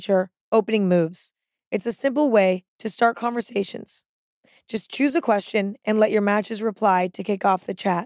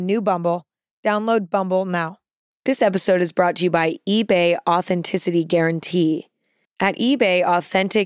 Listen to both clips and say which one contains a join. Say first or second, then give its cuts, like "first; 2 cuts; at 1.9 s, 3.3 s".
second; 1 cut; at 2.4 s